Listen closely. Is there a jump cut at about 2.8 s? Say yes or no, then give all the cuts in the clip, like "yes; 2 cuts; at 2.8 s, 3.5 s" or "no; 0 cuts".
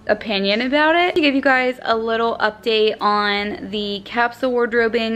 no; 1 cut; at 1.1 s